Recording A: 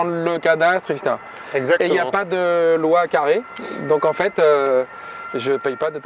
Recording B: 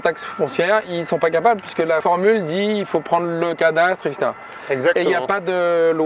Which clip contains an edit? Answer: B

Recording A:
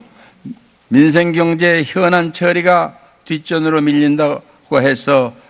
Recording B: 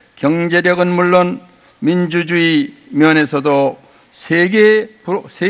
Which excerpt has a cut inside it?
B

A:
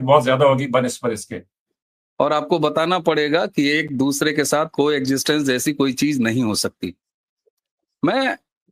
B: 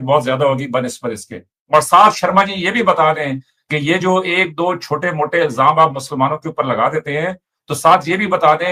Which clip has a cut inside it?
A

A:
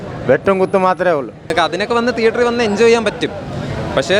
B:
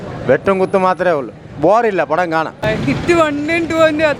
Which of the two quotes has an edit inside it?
A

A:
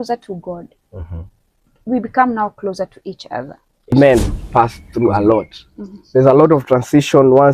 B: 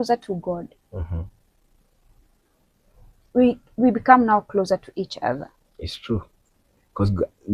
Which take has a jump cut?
A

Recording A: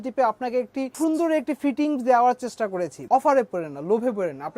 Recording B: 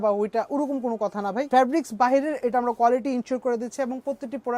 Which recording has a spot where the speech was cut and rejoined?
A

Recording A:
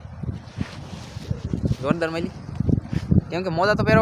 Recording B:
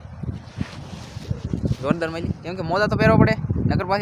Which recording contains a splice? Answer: B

